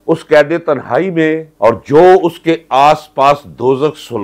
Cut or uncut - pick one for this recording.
uncut